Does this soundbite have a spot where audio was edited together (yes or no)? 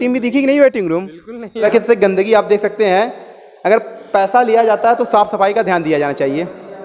yes